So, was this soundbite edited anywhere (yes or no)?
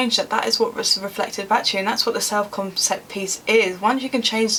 no